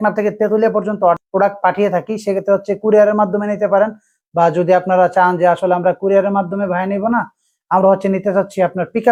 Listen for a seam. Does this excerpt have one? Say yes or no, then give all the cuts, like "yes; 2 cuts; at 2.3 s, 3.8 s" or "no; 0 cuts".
no; 0 cuts